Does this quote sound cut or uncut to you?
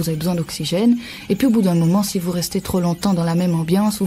uncut